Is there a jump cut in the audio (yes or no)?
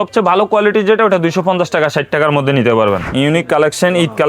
yes